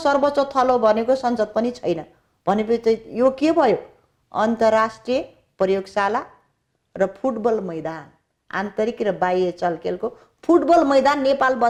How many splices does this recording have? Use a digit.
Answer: 0